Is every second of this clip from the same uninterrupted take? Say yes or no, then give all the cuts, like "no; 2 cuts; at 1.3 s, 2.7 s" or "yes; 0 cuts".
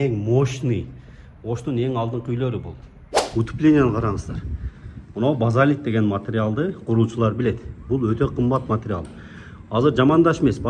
no; 1 cut; at 3.2 s